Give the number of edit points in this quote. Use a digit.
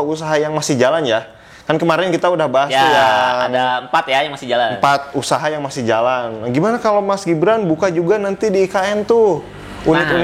0